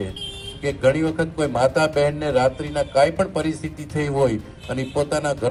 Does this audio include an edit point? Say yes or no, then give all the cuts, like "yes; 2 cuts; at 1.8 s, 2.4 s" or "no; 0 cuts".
no; 0 cuts